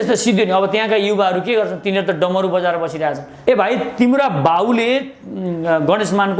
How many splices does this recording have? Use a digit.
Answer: 1